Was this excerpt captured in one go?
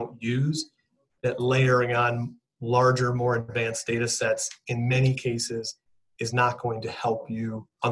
yes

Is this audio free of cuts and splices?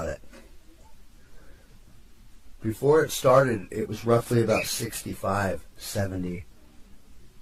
yes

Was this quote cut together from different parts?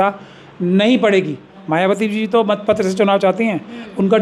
yes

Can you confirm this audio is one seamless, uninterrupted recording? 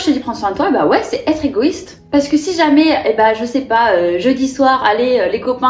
yes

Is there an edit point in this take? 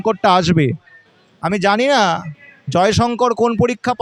no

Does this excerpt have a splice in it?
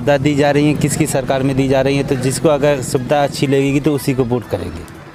no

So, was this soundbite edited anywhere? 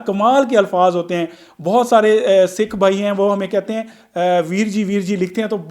no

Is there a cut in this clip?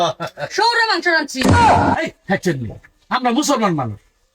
yes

